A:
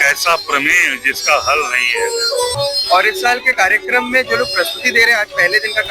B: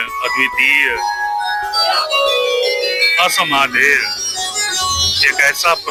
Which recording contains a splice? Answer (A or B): A